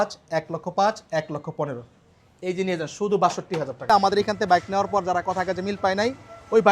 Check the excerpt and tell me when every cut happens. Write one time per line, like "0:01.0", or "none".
0:04.1